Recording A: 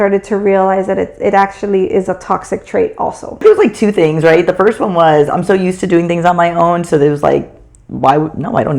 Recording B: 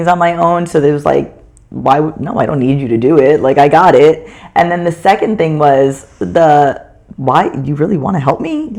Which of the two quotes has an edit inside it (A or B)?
A